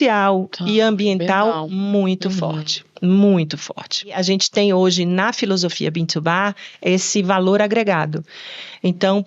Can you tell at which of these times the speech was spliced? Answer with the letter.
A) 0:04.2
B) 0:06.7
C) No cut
A